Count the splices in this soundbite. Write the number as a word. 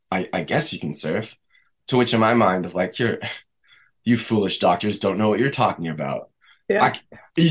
zero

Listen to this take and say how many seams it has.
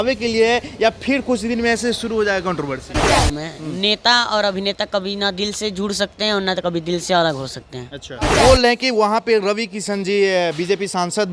two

